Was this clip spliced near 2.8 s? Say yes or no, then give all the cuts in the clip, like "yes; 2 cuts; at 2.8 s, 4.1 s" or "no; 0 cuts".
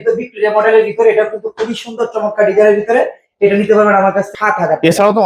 no; 1 cut; at 4.3 s